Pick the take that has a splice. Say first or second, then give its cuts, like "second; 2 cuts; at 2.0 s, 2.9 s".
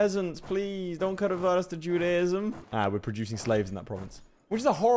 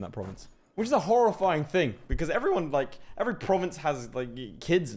first; 1 cut; at 2.6 s